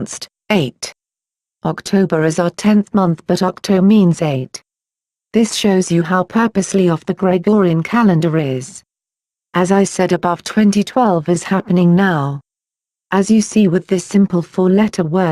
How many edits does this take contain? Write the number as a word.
one